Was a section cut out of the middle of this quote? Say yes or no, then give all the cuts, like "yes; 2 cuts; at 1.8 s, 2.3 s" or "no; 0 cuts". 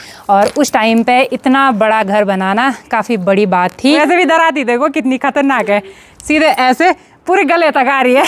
yes; 1 cut; at 4.0 s